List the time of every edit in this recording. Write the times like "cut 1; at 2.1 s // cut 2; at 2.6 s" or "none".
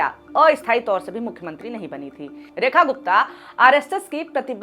cut 1; at 2.4 s

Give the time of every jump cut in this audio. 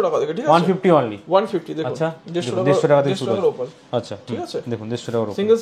none

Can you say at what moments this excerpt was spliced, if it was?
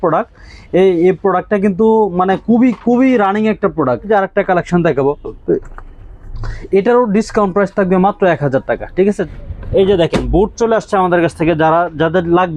cut 1; at 4.1 s // cut 2; at 9.2 s

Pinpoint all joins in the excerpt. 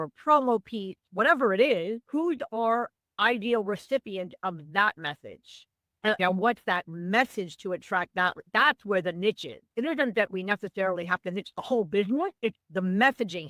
cut 1; at 12.6 s

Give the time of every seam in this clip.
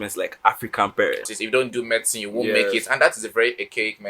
cut 1; at 1.4 s

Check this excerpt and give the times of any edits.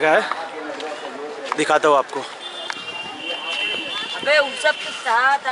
cut 1; at 2.8 s

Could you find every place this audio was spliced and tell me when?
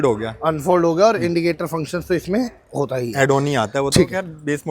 none

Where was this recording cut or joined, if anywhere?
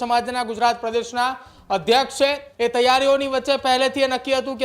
cut 1; at 2.5 s

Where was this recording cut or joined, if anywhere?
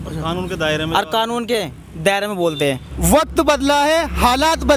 cut 1; at 2.9 s

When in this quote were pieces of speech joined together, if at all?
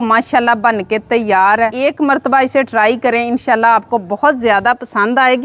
cut 1; at 1.7 s

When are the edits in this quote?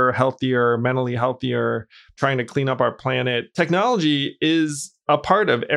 cut 1; at 2.2 s // cut 2; at 3.5 s

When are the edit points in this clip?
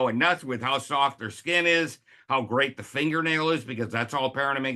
none

